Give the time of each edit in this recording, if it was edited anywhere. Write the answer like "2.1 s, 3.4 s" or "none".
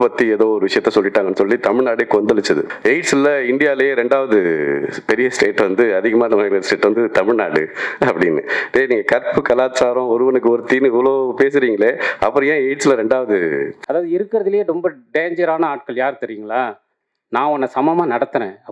2.7 s, 13.8 s